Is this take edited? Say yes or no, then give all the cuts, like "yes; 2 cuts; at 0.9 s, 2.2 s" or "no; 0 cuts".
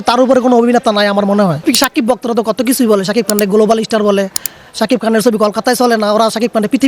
yes; 1 cut; at 1.6 s